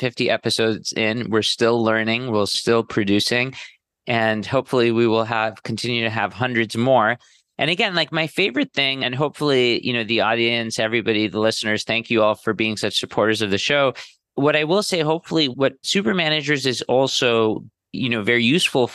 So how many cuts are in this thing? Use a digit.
2